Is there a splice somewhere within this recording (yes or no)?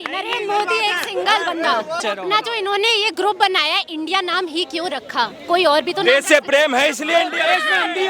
yes